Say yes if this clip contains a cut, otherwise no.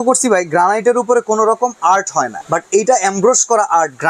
yes